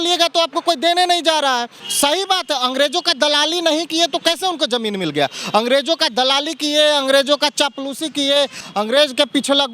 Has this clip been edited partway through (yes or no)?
yes